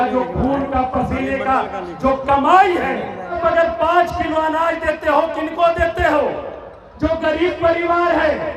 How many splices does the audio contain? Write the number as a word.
one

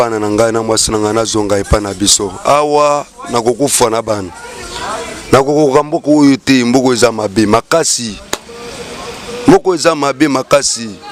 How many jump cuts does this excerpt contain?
zero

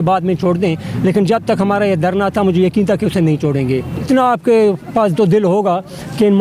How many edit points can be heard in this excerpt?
one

